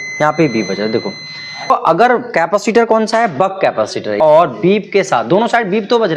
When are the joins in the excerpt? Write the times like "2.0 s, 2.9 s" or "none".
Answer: 1.7 s, 4.2 s